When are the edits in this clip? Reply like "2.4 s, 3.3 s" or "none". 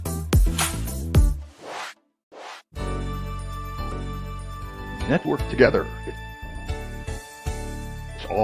2.6 s